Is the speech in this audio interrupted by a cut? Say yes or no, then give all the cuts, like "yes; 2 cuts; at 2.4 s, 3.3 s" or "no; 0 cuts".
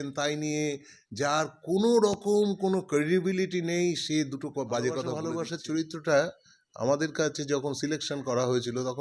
yes; 1 cut; at 5.3 s